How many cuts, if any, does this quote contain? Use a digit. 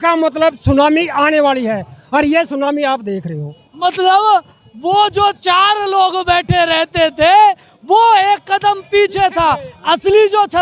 0